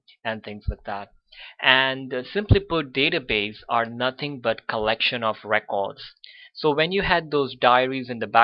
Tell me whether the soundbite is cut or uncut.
uncut